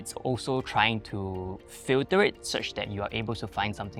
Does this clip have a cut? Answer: no; 0 cuts

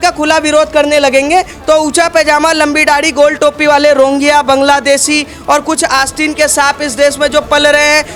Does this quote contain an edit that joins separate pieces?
no; 0 cuts

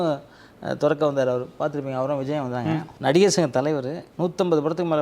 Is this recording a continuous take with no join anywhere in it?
no; 2 cuts; at 2.9 s, 4.0 s

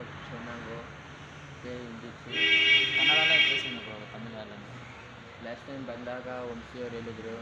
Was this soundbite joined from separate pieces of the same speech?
no; 0 cuts

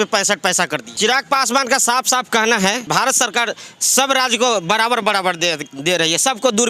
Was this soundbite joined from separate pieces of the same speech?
yes; 2 cuts; at 0.9 s, 2.9 s

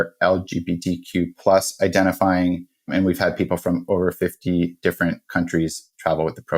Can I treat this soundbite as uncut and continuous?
yes; 0 cuts

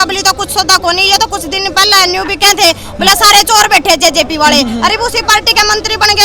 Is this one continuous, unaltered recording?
yes; 0 cuts

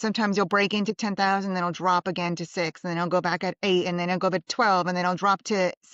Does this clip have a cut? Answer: no; 0 cuts

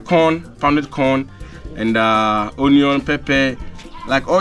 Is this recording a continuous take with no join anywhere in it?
yes; 0 cuts

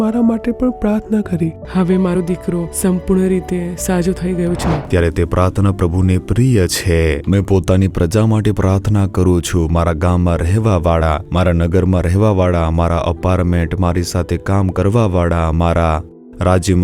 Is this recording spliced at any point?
yes; 2 cuts; at 1.6 s, 4.8 s

